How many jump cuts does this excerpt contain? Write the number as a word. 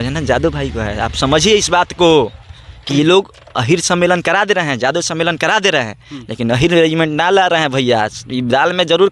zero